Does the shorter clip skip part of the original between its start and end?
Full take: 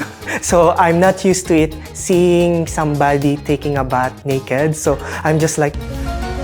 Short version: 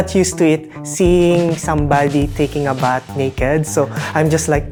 no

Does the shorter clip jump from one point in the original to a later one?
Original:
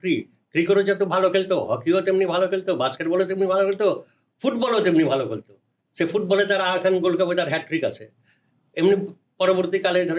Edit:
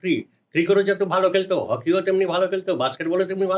no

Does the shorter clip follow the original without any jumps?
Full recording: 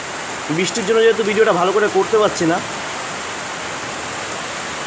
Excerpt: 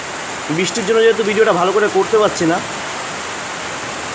yes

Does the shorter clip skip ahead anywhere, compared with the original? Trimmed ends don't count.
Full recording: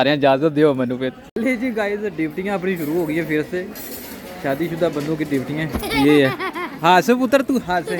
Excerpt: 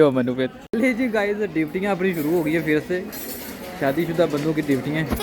no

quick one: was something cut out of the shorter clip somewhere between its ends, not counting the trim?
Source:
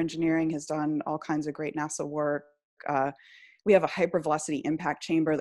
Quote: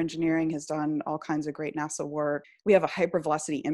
yes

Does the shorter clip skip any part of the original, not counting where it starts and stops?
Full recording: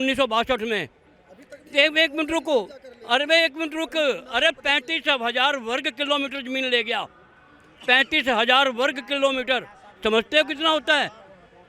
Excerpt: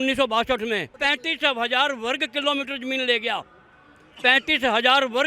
yes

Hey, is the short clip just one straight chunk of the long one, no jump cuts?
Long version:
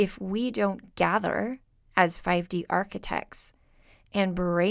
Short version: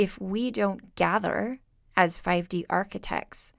yes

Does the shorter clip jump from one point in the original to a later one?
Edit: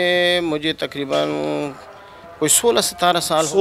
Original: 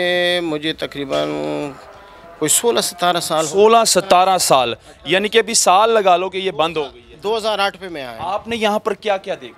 no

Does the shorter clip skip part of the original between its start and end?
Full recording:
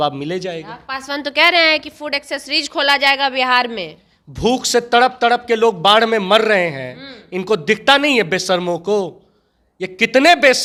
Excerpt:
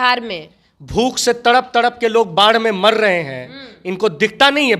no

